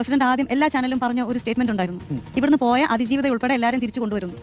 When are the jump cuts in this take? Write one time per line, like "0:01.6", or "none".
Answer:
none